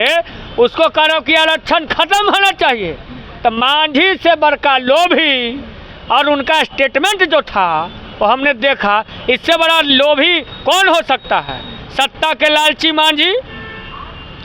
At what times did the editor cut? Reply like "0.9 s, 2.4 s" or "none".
none